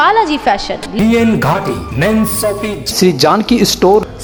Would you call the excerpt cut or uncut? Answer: uncut